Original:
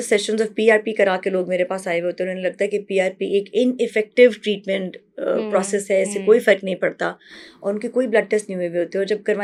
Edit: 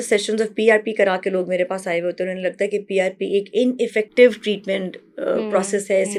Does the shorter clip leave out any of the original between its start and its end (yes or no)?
no